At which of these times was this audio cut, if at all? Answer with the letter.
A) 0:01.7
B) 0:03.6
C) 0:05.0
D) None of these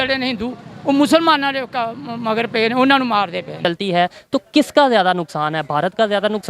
B